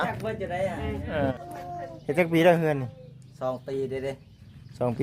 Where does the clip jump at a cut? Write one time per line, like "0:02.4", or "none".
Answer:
0:01.3